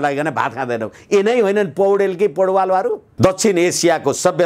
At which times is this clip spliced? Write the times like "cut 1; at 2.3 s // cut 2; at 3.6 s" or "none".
cut 1; at 3.1 s